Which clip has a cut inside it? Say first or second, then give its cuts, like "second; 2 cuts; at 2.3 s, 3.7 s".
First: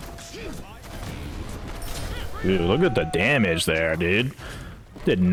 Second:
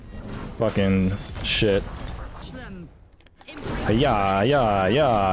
second; 1 cut; at 2.4 s